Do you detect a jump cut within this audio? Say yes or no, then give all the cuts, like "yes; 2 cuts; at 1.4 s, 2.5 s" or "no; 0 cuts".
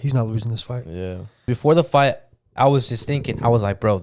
yes; 1 cut; at 1.5 s